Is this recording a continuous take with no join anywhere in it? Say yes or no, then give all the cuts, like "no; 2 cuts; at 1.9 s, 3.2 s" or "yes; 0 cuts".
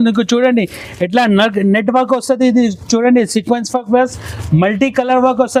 yes; 0 cuts